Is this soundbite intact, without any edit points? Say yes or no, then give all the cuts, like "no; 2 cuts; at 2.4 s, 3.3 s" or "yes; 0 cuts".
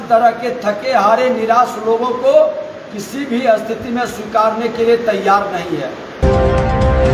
no; 1 cut; at 6.2 s